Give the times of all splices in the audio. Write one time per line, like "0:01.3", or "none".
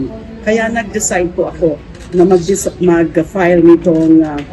none